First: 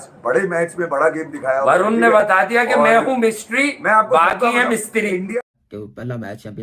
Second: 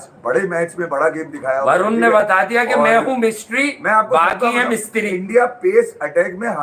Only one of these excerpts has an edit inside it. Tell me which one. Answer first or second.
first